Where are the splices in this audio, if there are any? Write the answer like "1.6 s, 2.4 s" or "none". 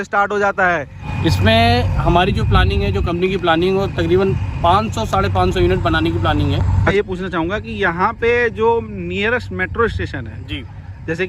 1.0 s, 6.9 s